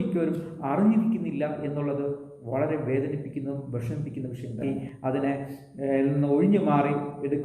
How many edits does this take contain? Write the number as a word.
one